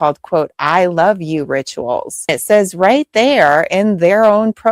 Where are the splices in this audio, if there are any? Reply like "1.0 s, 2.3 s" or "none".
2.3 s